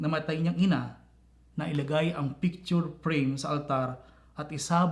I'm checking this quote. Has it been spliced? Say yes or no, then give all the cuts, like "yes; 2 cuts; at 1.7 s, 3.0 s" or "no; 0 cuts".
yes; 1 cut; at 1.5 s